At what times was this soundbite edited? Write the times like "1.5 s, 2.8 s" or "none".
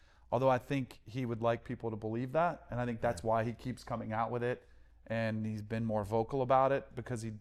none